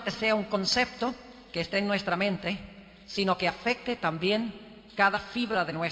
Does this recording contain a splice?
yes; 1 cut; at 1.5 s

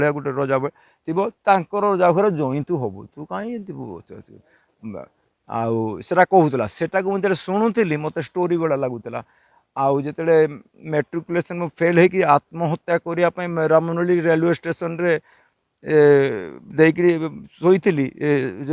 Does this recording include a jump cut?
no; 0 cuts

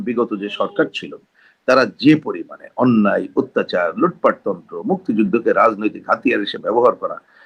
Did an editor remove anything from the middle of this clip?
no; 0 cuts

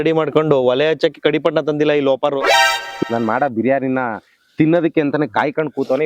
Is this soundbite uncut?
no; 1 cut; at 2.9 s

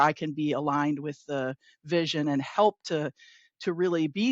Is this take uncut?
yes; 0 cuts

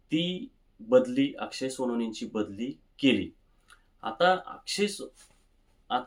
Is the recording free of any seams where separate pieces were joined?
yes; 0 cuts

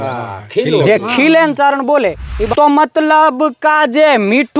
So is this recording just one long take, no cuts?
no; 1 cut; at 2.4 s

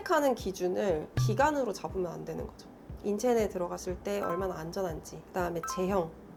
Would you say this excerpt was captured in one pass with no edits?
yes; 0 cuts

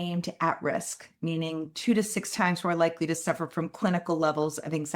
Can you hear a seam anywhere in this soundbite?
no; 0 cuts

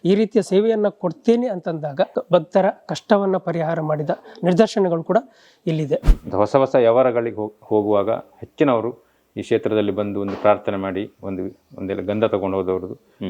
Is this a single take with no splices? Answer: no; 2 cuts; at 2.2 s, 6.1 s

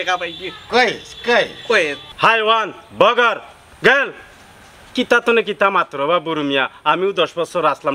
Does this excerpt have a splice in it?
yes; 1 cut; at 2.0 s

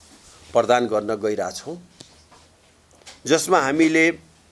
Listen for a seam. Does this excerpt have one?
no; 0 cuts

